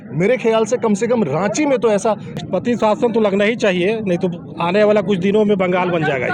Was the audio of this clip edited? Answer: yes; 1 cut; at 2.4 s

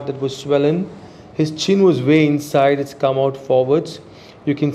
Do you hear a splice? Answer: no; 0 cuts

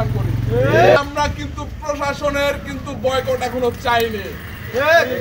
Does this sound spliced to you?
yes; 1 cut; at 1.0 s

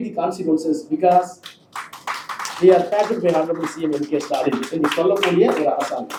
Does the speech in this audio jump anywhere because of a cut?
no; 0 cuts

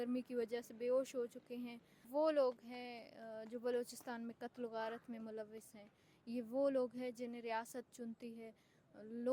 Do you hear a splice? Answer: yes; 1 cut; at 2.0 s

